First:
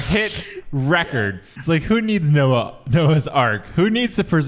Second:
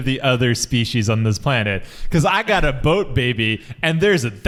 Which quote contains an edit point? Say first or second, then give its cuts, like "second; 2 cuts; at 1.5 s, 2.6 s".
first; 1 cut; at 1.5 s